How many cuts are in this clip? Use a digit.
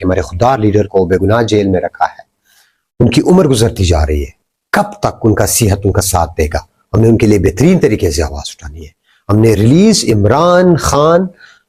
0